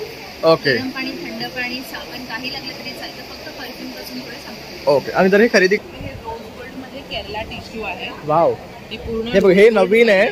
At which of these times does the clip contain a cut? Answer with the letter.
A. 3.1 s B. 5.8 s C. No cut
B